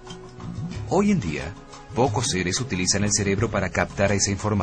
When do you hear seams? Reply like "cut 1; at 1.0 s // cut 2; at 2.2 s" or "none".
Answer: cut 1; at 3.1 s

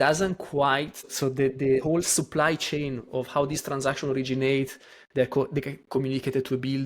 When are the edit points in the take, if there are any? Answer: cut 1; at 1.1 s

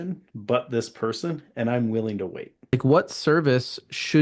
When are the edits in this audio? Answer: cut 1; at 2.7 s

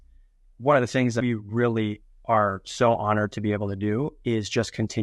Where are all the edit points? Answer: cut 1; at 1.1 s

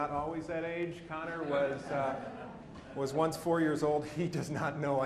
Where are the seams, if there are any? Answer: cut 1; at 2.8 s

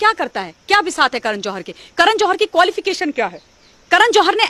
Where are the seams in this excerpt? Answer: none

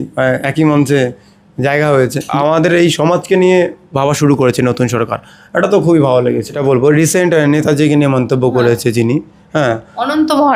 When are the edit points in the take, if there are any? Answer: cut 1; at 2.3 s // cut 2; at 6.5 s

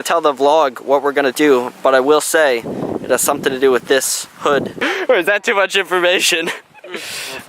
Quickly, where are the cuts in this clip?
cut 1; at 4.7 s

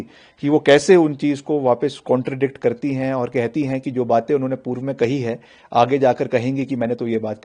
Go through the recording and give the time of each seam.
none

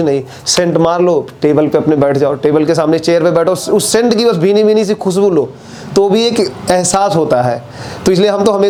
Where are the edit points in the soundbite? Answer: none

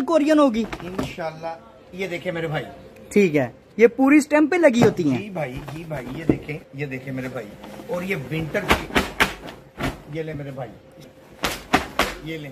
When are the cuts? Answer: cut 1; at 3.6 s // cut 2; at 6.6 s // cut 3; at 11.2 s

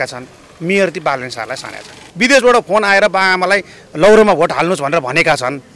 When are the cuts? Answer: cut 1; at 2.0 s

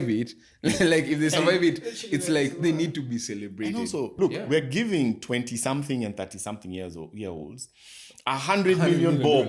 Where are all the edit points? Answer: cut 1; at 4.1 s

